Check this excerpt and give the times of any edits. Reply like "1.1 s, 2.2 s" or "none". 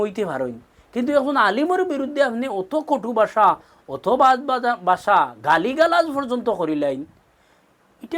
none